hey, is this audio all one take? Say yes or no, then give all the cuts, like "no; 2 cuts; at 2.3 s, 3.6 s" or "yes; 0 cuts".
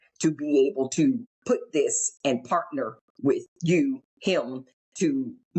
no; 2 cuts; at 1.3 s, 4.1 s